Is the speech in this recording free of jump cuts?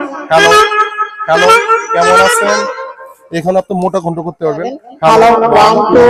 yes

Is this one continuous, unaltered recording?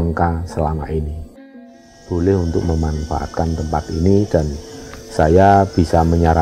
no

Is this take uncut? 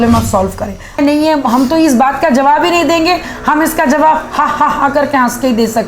no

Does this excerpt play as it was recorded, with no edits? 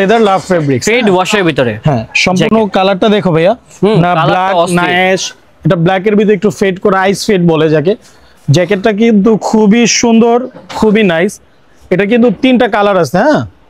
yes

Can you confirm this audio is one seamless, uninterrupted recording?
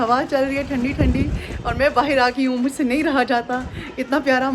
yes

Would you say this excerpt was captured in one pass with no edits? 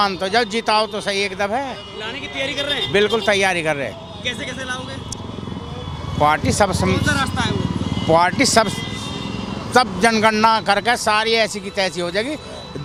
yes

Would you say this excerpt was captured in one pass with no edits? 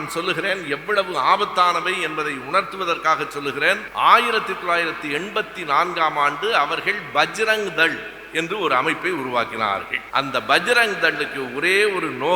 no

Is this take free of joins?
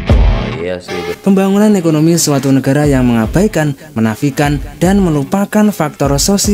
no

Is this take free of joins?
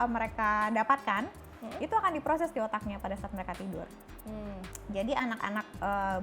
yes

